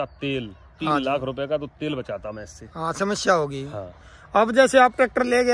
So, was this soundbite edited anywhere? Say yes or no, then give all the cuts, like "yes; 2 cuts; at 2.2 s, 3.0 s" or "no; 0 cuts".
no; 0 cuts